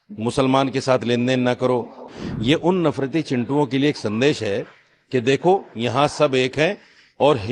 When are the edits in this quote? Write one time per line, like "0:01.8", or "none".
0:02.1